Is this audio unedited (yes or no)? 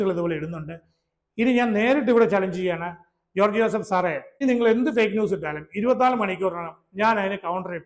no